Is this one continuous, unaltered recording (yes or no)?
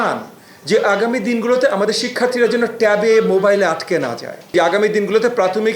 no